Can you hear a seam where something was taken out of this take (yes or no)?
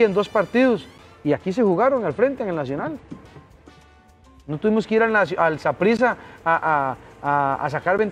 no